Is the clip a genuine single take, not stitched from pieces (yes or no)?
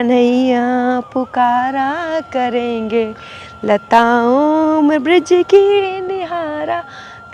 yes